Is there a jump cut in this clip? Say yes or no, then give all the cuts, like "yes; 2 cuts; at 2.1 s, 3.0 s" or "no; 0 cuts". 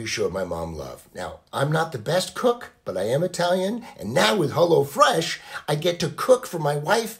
no; 0 cuts